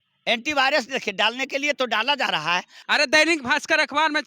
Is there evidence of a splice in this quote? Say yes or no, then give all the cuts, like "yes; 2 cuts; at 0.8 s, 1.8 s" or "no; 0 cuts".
yes; 1 cut; at 2.7 s